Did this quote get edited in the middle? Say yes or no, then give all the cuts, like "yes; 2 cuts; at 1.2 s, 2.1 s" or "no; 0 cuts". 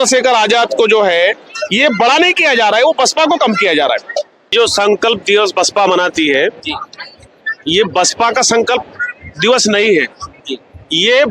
yes; 1 cut; at 4.5 s